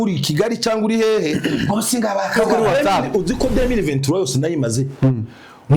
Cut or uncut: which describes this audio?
cut